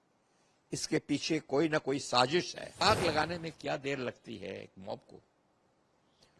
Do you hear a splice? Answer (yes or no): yes